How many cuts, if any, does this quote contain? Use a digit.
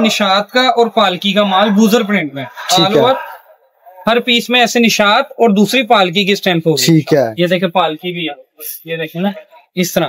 0